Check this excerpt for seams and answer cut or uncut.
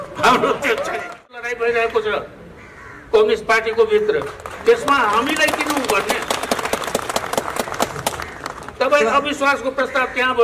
cut